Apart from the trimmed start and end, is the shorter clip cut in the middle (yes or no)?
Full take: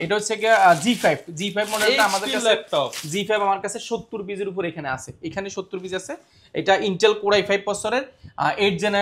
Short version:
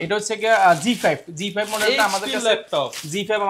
no